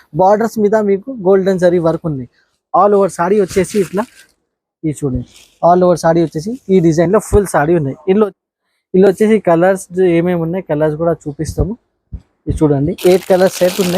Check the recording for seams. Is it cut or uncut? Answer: cut